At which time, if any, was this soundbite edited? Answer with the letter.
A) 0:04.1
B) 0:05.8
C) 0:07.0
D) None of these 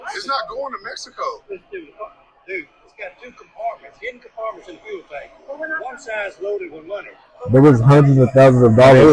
D